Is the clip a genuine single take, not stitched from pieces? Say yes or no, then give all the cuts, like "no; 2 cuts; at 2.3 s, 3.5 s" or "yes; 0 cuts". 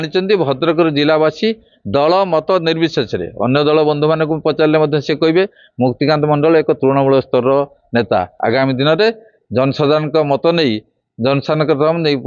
no; 1 cut; at 8.3 s